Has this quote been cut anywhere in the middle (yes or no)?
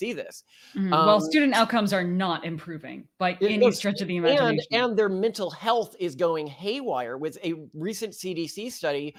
no